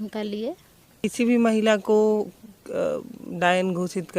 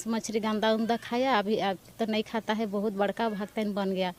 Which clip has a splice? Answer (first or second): first